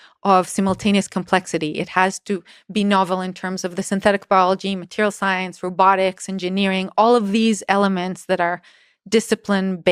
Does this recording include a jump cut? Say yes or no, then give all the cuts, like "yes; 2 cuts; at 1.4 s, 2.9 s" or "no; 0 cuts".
no; 0 cuts